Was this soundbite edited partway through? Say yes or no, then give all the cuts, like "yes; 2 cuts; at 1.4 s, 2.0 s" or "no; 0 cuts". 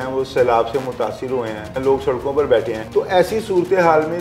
yes; 2 cuts; at 1.8 s, 2.8 s